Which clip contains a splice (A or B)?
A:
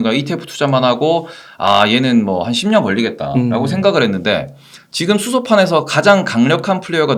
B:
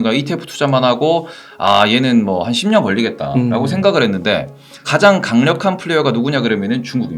B